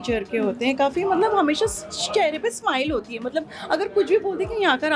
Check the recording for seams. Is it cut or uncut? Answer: uncut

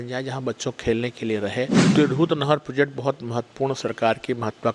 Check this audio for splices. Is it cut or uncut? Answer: cut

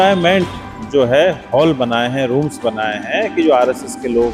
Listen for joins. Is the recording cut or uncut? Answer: uncut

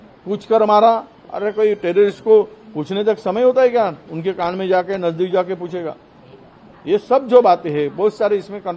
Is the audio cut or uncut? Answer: uncut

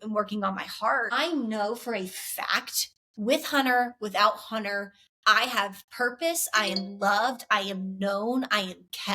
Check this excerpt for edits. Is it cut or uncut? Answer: cut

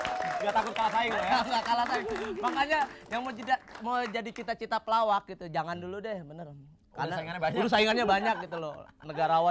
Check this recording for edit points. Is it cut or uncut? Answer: uncut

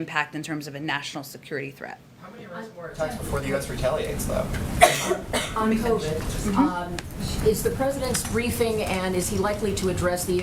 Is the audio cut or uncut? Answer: uncut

